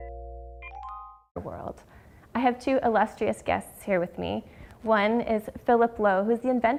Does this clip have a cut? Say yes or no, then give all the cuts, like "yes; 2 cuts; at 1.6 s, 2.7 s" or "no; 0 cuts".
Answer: no; 0 cuts